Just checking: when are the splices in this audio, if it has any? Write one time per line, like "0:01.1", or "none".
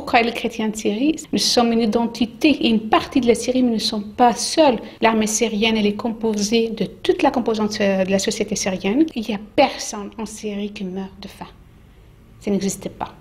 0:01.2
0:04.9
0:09.1